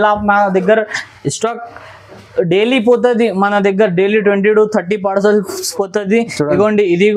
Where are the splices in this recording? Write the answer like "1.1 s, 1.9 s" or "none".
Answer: none